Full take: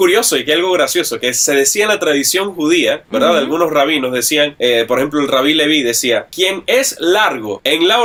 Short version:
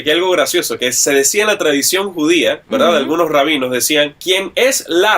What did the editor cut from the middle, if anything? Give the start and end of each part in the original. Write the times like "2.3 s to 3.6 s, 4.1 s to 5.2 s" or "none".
4.5 s to 6.2 s